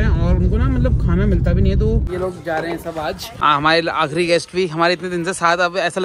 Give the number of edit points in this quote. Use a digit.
2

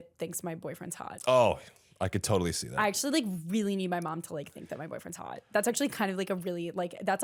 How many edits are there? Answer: 0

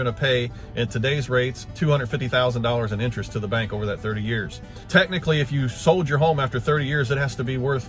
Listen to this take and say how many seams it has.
1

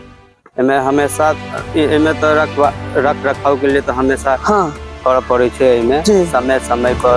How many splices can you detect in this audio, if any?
0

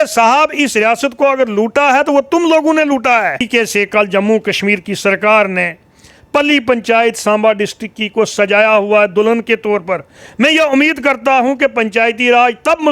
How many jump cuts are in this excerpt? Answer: 1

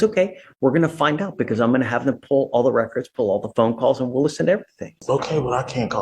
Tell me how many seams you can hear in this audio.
1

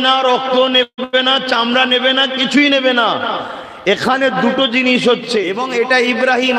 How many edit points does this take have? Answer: 1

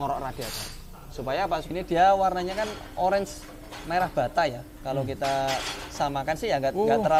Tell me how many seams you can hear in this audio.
1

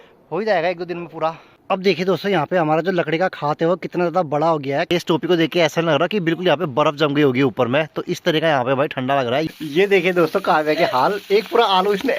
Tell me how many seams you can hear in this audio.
3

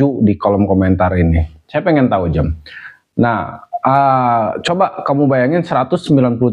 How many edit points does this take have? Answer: 0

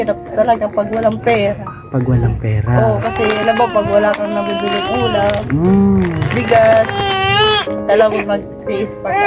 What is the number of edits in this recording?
0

